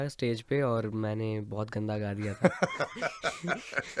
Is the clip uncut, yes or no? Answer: yes